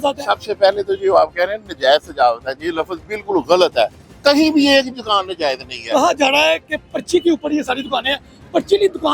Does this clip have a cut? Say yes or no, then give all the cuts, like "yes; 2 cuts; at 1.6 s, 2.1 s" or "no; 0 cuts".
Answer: yes; 1 cut; at 4.0 s